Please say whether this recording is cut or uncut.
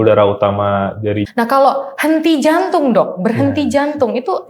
cut